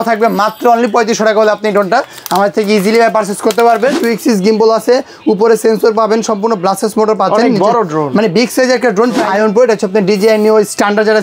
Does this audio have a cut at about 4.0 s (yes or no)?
yes